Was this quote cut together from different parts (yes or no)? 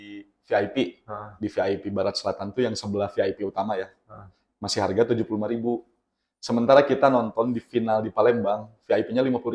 no